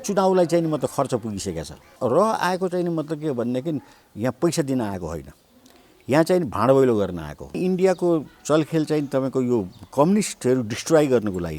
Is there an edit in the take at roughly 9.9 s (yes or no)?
no